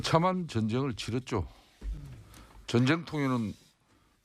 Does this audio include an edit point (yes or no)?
no